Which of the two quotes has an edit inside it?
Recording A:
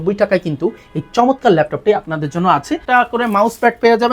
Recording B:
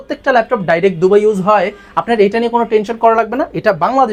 A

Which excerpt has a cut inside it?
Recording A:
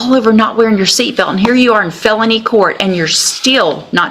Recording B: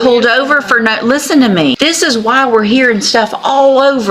B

